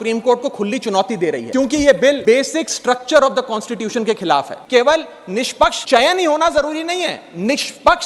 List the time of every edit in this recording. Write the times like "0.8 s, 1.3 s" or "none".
1.5 s, 2.2 s, 4.6 s, 5.8 s